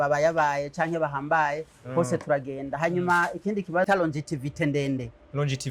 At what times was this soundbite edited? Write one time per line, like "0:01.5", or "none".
0:03.9